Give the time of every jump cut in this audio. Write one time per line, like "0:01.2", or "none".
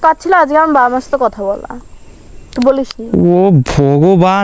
none